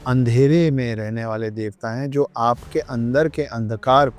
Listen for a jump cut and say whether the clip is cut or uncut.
uncut